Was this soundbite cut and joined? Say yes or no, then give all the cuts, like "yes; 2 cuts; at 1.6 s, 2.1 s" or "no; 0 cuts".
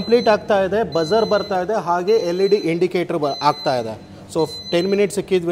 no; 0 cuts